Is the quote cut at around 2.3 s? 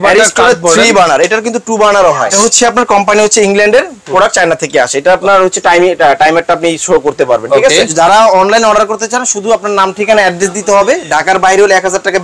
yes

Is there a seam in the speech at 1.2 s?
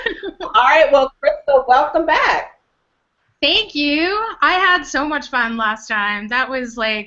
no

